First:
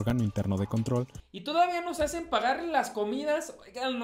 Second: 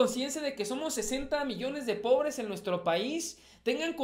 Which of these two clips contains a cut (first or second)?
first